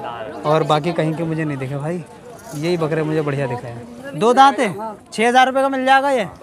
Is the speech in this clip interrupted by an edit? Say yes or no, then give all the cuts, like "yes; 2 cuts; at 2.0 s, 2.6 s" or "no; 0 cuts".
yes; 1 cut; at 4.0 s